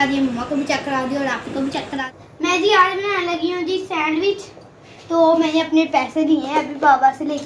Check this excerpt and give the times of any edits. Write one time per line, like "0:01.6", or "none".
0:02.0